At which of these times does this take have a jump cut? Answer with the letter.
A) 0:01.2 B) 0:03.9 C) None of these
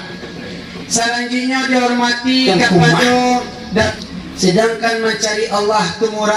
B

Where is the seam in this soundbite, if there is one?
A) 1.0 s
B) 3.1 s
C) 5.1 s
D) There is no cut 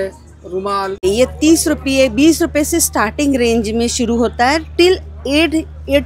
A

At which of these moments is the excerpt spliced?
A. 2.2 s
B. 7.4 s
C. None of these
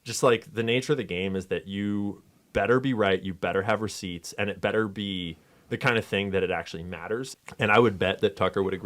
B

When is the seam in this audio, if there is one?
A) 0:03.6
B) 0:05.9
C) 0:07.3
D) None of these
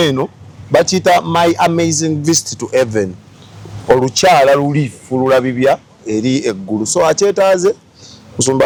D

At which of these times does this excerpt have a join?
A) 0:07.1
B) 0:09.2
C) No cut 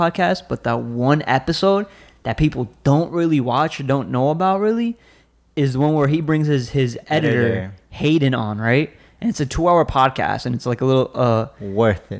C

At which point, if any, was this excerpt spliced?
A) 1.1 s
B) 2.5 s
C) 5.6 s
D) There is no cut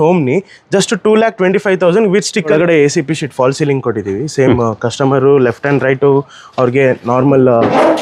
B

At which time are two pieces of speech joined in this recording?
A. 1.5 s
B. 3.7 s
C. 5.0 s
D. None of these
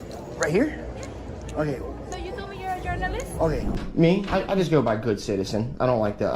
B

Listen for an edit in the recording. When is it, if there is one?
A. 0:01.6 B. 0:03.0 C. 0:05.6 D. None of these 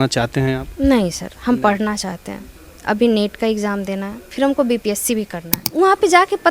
C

